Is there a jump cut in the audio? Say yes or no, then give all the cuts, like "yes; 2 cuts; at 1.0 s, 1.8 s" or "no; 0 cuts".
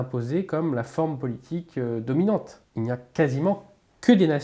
yes; 1 cut; at 2.6 s